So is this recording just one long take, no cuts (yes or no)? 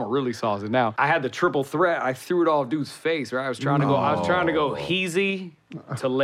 no